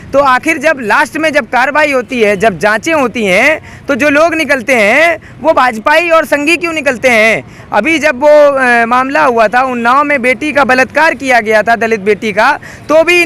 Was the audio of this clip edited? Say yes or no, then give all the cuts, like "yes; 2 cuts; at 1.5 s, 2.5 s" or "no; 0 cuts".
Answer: no; 0 cuts